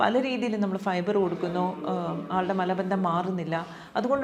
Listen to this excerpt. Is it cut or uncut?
uncut